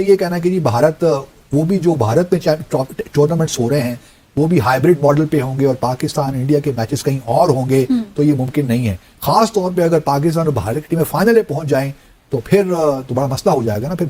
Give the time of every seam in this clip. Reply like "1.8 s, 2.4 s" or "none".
none

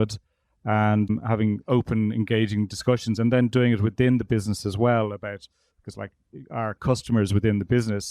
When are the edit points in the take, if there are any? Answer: 1.1 s

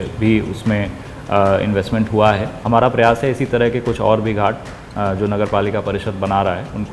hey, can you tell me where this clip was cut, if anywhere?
2.5 s

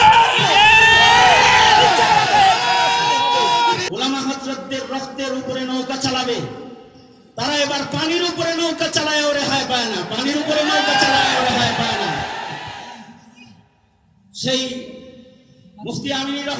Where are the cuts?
3.8 s

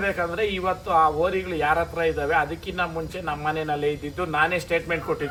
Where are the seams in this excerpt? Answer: none

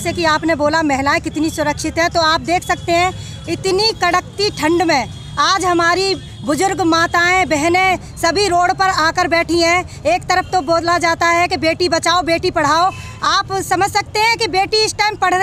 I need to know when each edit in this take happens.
none

